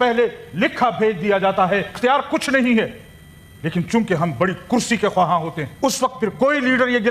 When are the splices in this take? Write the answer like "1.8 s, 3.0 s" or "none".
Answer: 1.9 s, 5.6 s